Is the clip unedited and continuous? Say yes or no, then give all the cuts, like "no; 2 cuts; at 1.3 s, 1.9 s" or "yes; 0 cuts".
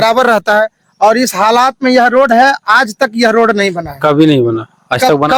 yes; 0 cuts